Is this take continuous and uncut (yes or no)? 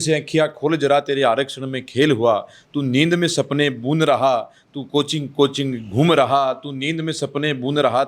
yes